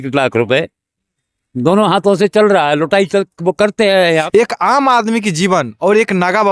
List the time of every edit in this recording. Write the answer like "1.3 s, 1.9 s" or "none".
4.2 s

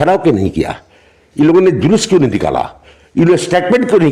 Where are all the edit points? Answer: none

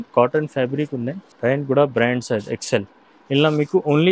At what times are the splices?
1.2 s

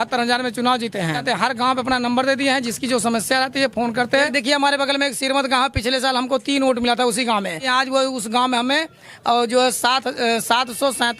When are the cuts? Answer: 1.2 s, 4.3 s, 7.6 s

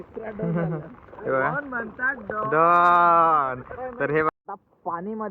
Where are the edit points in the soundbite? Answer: 4.3 s

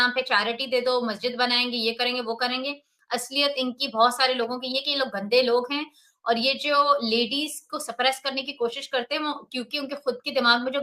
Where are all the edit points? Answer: none

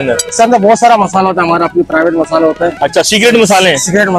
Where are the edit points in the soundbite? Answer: none

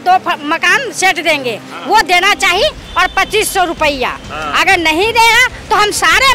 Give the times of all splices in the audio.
none

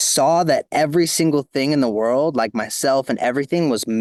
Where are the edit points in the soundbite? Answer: none

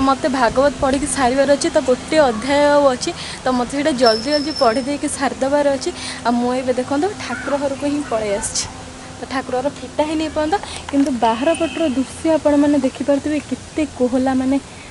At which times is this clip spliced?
none

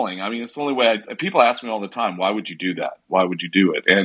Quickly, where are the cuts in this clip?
none

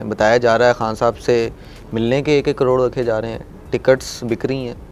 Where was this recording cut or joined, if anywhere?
none

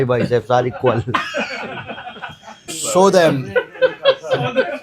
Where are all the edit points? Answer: 2.5 s

